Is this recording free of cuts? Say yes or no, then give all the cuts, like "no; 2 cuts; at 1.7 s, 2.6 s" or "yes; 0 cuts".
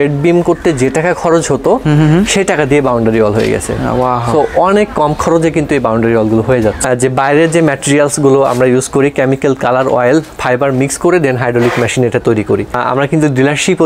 no; 2 cuts; at 6.8 s, 12.7 s